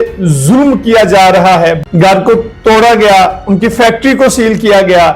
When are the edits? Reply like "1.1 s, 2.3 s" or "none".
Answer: 1.8 s